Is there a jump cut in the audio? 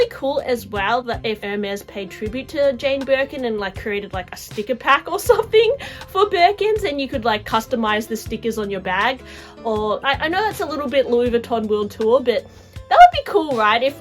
yes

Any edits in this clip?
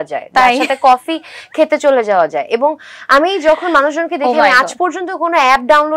no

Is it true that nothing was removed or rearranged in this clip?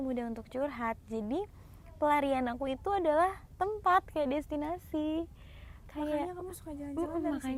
yes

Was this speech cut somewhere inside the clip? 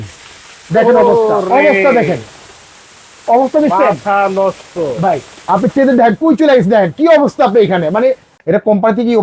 yes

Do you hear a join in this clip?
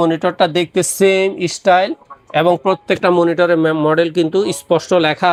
no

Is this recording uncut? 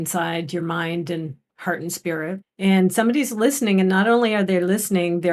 no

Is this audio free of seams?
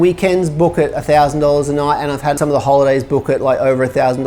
no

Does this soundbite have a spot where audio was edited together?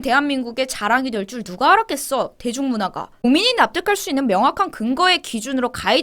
yes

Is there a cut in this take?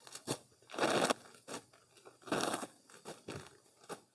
no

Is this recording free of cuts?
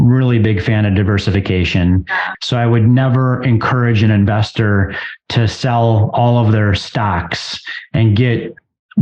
no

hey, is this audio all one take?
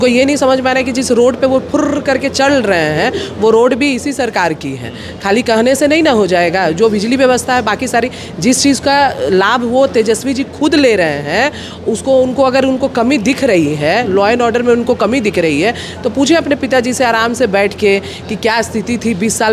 yes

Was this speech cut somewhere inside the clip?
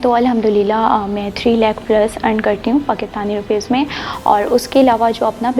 no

